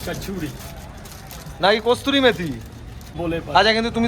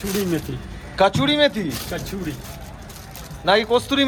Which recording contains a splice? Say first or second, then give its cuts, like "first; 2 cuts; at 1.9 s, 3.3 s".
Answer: first; 1 cut; at 3.2 s